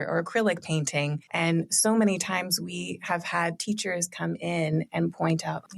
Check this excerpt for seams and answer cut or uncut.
cut